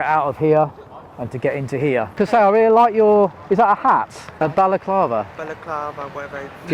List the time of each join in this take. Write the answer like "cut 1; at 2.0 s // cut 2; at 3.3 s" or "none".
cut 1; at 2.1 s // cut 2; at 4.2 s